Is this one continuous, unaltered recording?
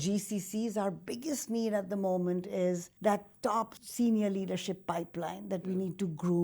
no; 2 cuts; at 2.9 s, 3.8 s

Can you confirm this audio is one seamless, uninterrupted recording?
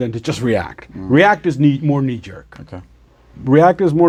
yes; 0 cuts

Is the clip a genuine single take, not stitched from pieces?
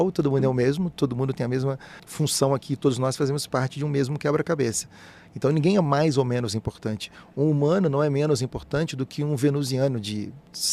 no; 1 cut; at 2.0 s

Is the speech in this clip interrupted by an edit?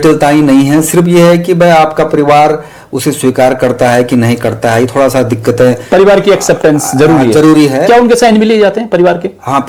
no; 0 cuts

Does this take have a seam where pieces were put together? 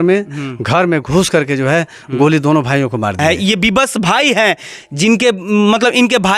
yes; 1 cut; at 3.2 s

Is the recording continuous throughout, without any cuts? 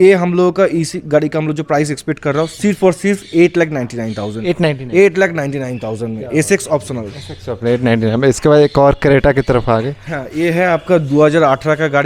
yes; 0 cuts

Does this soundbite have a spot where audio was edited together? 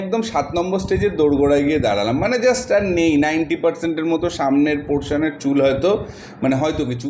no; 0 cuts

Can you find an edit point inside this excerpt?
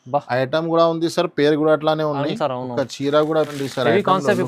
yes; 1 cut; at 3.5 s

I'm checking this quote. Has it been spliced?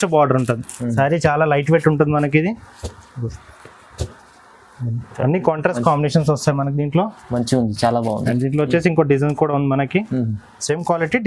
no; 0 cuts

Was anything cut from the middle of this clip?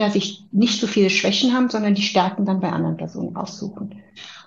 no; 0 cuts

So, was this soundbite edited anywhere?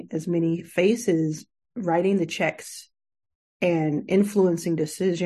no; 0 cuts

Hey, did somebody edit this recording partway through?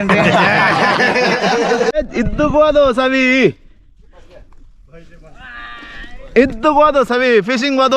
yes; 1 cut; at 1.9 s

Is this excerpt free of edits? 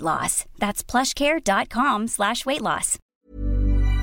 no; 1 cut; at 3.0 s

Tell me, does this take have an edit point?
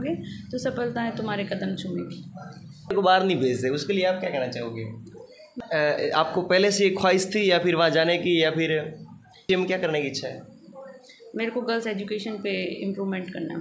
yes; 3 cuts; at 2.9 s, 5.4 s, 9.4 s

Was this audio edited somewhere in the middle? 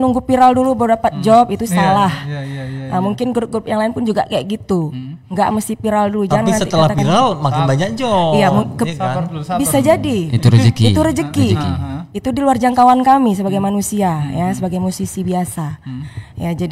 no; 0 cuts

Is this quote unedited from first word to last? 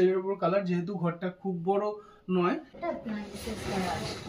no; 1 cut; at 2.7 s

